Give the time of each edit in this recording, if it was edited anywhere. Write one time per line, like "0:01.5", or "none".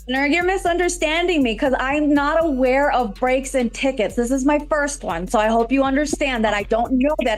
none